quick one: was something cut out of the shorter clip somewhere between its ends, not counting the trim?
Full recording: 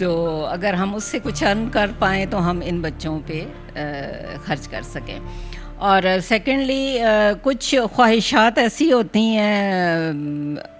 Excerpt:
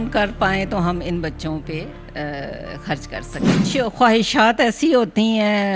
yes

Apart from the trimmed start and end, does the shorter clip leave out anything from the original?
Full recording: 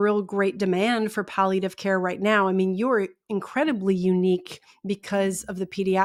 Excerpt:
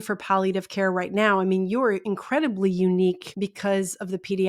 yes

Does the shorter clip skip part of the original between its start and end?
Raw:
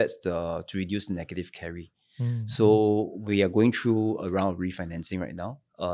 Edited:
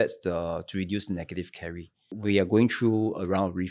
yes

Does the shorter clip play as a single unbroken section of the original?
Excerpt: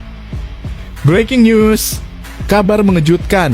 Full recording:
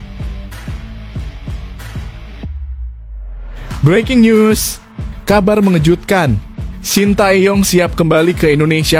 no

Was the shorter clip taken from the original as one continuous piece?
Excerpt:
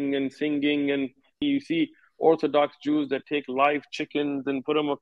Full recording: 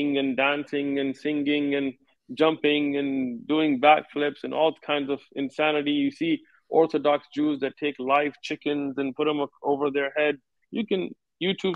no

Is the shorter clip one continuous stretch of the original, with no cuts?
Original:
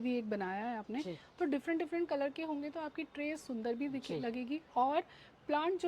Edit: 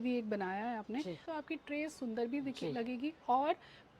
no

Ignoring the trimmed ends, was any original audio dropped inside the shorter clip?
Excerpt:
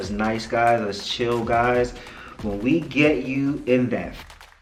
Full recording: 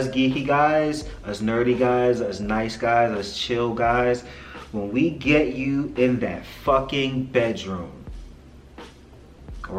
no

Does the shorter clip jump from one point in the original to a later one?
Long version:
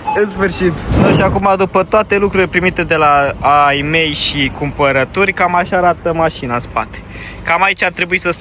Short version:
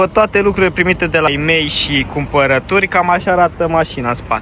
yes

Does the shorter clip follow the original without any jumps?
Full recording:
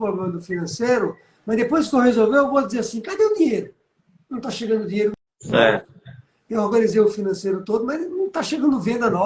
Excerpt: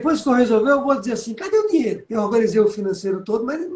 no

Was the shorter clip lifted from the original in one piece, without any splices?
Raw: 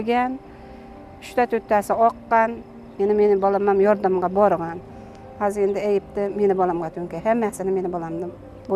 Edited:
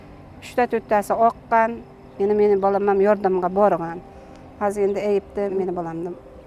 no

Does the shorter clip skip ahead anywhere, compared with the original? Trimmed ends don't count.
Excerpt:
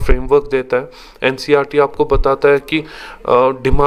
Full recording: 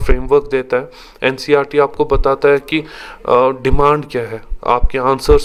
no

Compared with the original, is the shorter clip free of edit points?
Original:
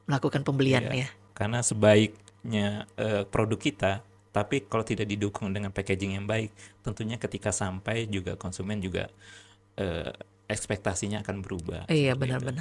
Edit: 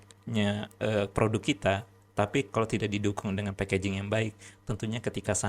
yes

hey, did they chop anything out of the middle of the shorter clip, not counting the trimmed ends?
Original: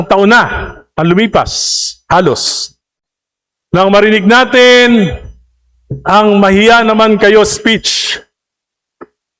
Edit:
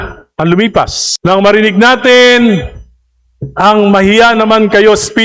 yes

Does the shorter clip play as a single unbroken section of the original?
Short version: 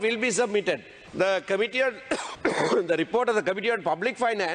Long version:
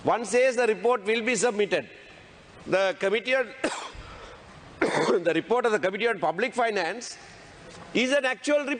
no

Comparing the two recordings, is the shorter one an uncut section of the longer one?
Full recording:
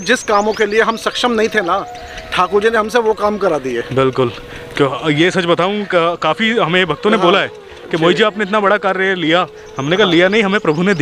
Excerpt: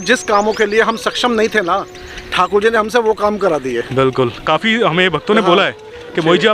no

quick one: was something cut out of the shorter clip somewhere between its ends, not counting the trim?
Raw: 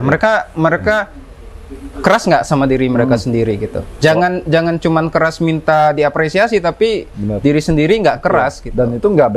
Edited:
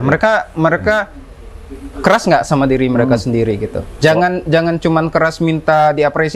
no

